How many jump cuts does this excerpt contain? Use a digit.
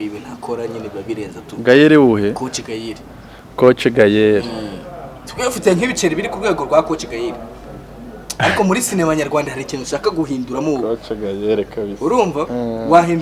0